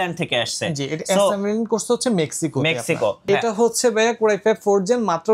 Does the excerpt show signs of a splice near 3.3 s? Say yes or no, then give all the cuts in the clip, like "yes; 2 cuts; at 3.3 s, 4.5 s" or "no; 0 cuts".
yes; 1 cut; at 3.3 s